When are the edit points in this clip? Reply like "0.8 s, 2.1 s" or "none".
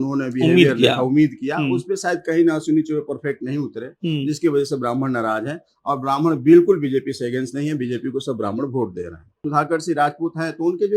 9.4 s